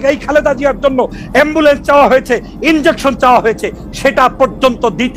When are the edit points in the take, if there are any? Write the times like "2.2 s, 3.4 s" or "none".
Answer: none